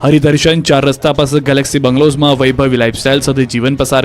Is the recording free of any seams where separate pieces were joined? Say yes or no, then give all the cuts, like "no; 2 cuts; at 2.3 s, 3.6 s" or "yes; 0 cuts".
no; 1 cut; at 2.4 s